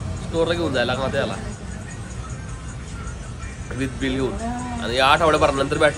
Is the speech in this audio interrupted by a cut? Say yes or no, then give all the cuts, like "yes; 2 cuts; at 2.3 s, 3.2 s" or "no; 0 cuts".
no; 0 cuts